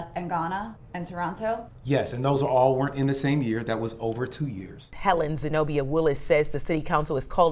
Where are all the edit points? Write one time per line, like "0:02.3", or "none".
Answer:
0:04.9